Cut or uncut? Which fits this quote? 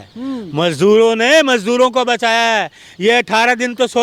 uncut